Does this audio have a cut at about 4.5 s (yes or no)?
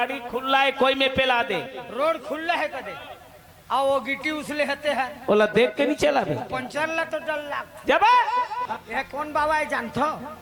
no